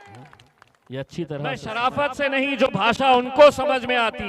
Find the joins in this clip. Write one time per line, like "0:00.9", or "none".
0:01.6

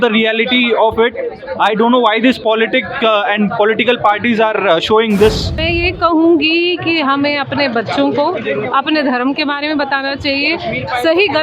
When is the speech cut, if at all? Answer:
0:05.5

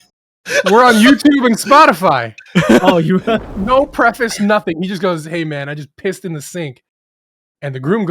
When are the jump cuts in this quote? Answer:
0:03.5

